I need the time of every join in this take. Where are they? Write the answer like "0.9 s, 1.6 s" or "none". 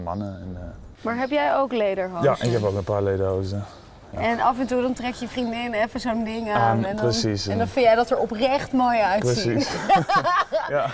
0.9 s